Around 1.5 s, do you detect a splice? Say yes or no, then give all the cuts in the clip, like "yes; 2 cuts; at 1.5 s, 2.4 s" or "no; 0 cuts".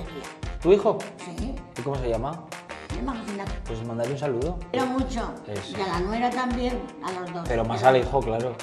no; 0 cuts